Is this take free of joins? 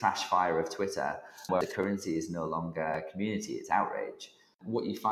no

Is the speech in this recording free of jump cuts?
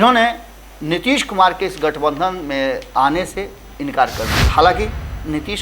no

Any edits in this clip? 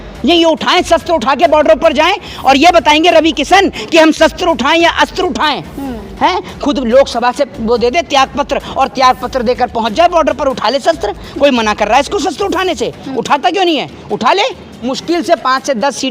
yes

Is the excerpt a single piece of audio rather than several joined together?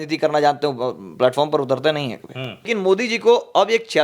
no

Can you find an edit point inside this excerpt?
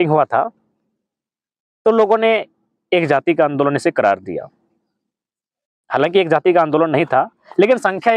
no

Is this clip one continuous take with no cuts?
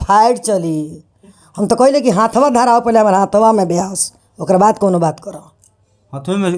yes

